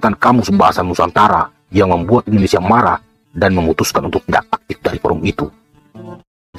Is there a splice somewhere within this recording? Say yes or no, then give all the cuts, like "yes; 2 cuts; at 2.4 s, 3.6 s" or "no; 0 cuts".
no; 0 cuts